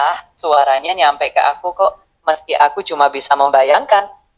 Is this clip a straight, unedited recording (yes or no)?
yes